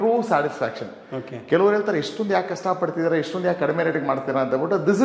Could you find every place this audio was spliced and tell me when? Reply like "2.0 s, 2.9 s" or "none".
none